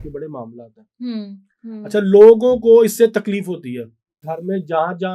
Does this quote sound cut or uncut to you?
cut